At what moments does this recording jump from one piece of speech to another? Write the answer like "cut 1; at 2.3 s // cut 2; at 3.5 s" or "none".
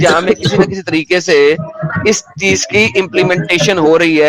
none